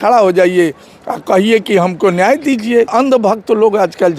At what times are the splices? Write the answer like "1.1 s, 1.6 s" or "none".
2.9 s